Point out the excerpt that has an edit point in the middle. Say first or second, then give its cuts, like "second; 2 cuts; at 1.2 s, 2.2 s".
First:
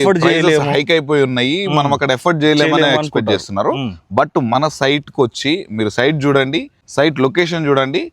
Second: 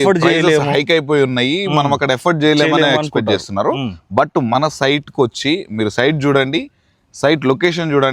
first; 1 cut; at 6.8 s